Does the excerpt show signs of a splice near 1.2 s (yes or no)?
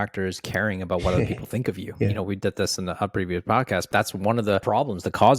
no